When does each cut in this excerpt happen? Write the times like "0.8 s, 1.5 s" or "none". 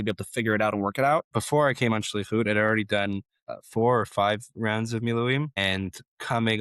1.4 s